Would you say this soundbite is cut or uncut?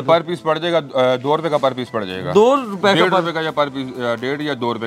uncut